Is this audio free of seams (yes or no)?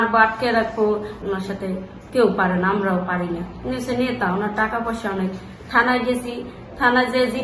no